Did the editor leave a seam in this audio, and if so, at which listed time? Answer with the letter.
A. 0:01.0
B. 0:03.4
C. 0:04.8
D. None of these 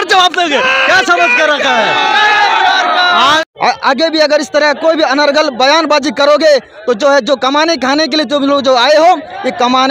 B